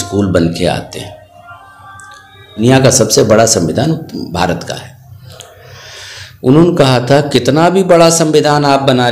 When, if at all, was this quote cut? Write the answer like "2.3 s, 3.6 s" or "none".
2.6 s